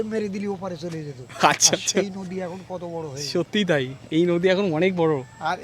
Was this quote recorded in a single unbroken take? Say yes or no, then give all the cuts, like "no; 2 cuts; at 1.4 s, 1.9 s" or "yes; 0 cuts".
yes; 0 cuts